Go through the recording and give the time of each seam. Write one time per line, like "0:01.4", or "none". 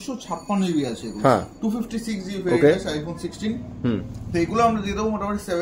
none